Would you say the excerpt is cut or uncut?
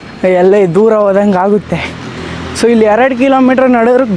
uncut